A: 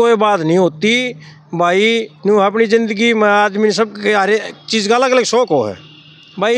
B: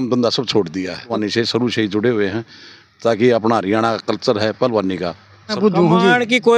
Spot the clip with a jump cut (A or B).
B